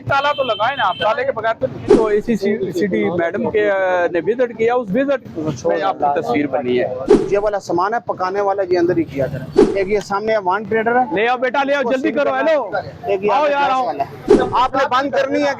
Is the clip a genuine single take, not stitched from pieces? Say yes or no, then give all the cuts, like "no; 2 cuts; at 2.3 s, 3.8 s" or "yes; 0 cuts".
no; 4 cuts; at 1.9 s, 7.1 s, 9.5 s, 14.3 s